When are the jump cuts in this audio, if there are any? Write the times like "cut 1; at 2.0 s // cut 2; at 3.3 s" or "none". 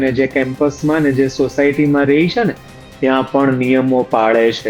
none